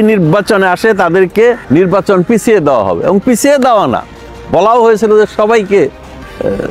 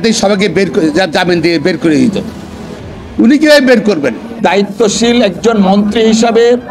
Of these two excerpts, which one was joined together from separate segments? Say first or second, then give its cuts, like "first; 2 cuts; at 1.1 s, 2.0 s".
second; 1 cut; at 4.4 s